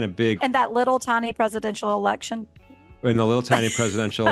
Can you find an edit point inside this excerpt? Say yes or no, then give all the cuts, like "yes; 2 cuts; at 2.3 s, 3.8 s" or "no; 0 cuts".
no; 0 cuts